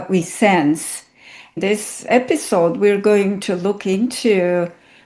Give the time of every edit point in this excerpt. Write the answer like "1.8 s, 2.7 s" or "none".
1.6 s